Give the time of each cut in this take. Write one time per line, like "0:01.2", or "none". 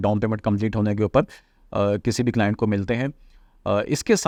none